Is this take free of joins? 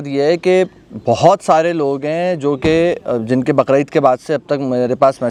yes; 0 cuts

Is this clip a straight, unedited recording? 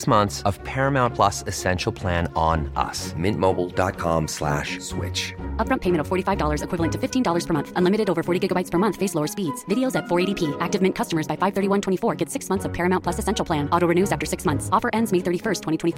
yes; 0 cuts

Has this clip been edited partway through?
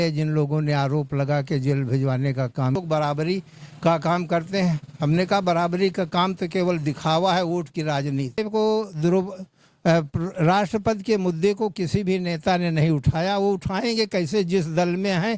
yes; 2 cuts; at 2.8 s, 8.4 s

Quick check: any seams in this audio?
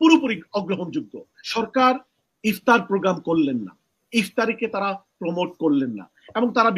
yes; 1 cut; at 1.4 s

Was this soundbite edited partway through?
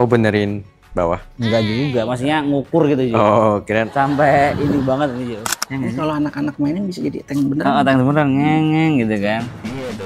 yes; 1 cut; at 5.5 s

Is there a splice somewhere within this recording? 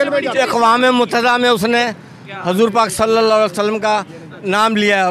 no; 0 cuts

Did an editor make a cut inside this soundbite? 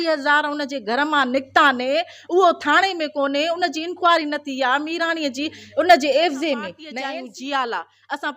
yes; 1 cut; at 6.8 s

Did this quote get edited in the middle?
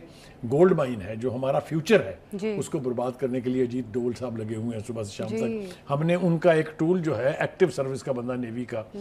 no; 0 cuts

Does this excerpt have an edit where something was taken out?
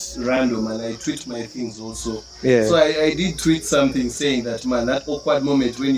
no; 0 cuts

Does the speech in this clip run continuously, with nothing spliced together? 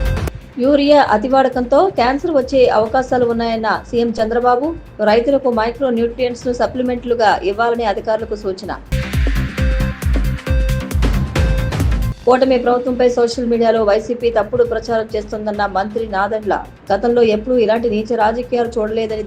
yes; 0 cuts

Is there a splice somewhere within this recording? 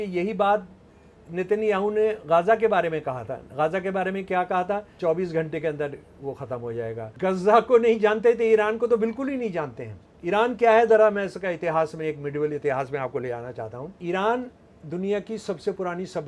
yes; 3 cuts; at 4.9 s, 7.0 s, 13.9 s

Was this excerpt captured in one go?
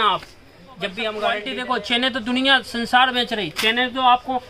no; 1 cut; at 1.5 s

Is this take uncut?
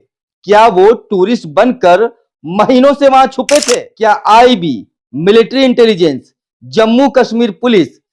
no; 1 cut; at 3.8 s

